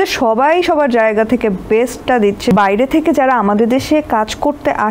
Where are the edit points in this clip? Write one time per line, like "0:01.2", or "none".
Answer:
0:02.5